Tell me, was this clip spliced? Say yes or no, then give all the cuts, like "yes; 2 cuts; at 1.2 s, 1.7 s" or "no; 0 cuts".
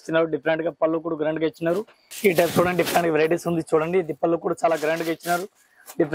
yes; 1 cut; at 2.0 s